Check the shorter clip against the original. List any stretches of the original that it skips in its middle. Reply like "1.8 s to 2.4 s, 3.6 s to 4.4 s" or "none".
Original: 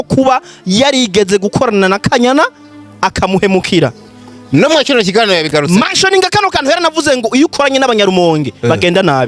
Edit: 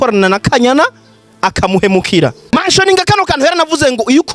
4.1 s to 5.8 s